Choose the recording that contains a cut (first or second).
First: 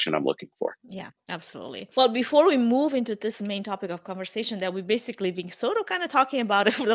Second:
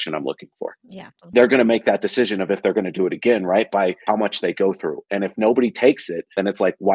second